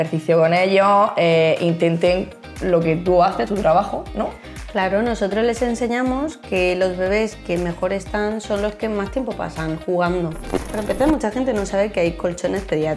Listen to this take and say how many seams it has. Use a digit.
1